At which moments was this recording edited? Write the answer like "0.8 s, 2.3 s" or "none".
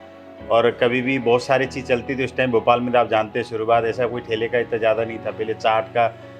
none